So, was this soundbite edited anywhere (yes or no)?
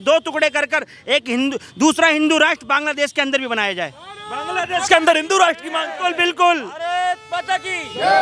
no